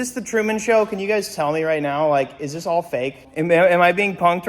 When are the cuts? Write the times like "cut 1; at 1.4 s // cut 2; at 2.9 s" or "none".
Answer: cut 1; at 3.2 s